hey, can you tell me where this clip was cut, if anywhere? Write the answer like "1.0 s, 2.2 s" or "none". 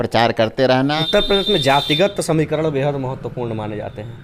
1.0 s